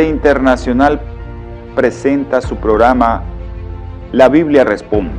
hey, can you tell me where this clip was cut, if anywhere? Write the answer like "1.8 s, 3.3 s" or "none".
2.0 s

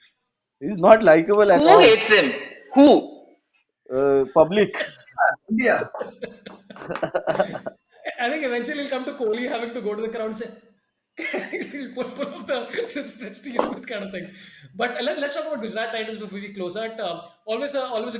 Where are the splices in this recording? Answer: none

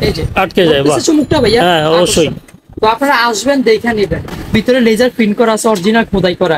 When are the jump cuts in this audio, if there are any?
4.4 s

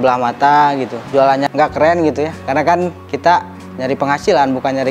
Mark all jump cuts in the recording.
1.3 s, 3.6 s

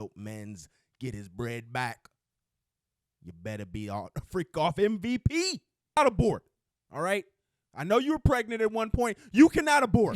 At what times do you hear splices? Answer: 6.0 s

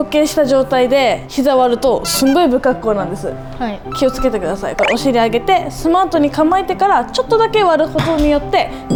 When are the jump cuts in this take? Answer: none

